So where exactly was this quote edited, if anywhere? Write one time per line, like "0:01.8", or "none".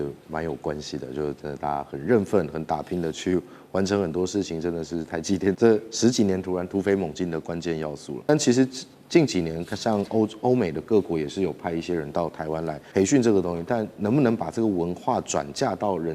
0:05.6
0:08.3
0:12.8